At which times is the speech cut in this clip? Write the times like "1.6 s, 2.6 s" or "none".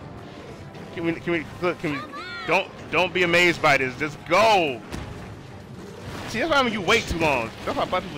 none